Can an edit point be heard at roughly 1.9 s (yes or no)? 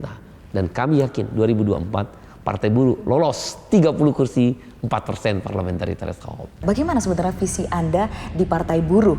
no